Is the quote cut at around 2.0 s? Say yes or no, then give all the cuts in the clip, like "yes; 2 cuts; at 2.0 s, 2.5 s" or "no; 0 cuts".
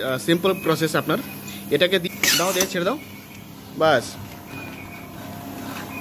yes; 1 cut; at 2.0 s